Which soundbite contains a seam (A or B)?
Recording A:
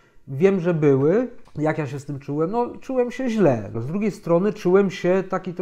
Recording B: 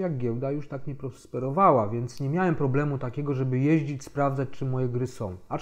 A